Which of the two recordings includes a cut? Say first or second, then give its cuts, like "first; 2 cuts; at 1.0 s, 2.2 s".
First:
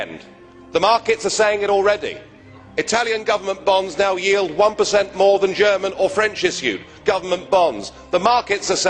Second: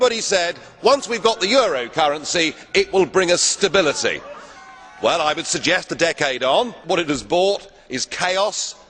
second; 1 cut; at 6.8 s